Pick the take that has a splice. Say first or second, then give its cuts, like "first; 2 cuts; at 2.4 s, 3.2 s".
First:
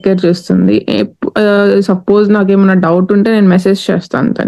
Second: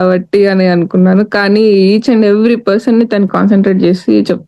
second; 1 cut; at 3.3 s